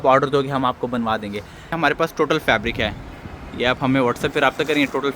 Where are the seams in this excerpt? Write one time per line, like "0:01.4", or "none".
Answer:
0:01.8